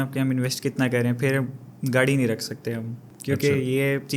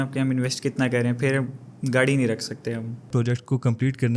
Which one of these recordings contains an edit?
second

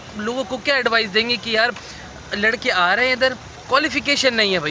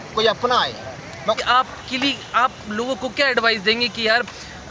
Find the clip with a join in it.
second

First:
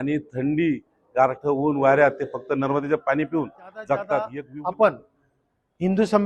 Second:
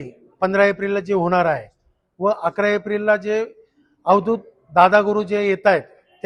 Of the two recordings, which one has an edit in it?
first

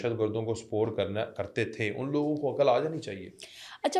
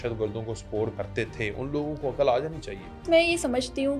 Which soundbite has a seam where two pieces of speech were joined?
second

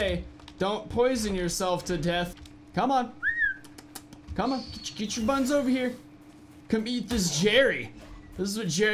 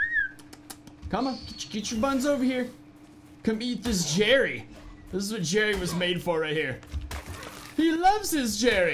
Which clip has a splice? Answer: first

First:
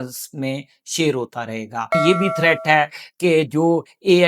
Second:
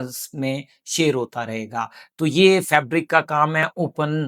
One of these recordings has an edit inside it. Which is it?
first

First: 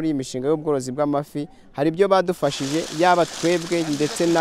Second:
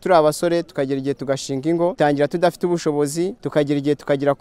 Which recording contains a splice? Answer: second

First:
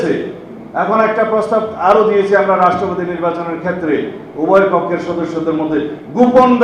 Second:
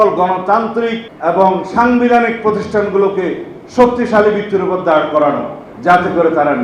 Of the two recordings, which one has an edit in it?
second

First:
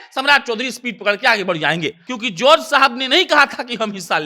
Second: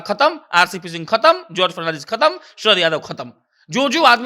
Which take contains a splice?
first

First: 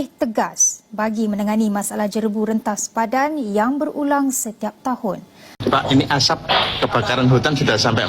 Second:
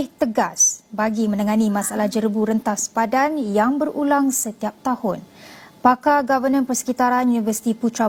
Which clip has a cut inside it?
first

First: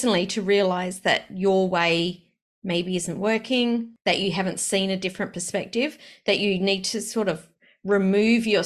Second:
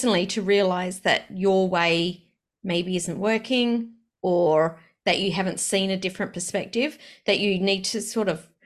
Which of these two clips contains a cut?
first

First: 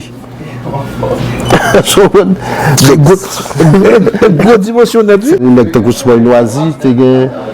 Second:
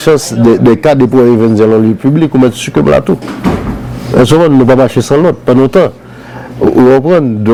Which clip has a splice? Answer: first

